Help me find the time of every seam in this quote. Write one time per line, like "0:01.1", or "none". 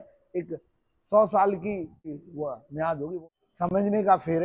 0:02.1
0:03.2